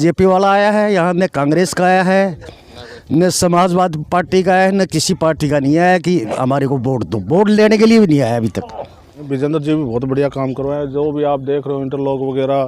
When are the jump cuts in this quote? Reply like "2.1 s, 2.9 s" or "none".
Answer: 9.4 s